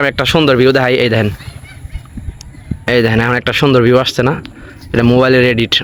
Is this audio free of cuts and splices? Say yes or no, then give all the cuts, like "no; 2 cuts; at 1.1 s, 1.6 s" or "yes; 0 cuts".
yes; 0 cuts